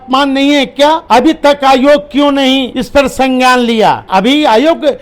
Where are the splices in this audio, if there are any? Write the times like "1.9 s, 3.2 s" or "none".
1.0 s, 2.8 s, 4.0 s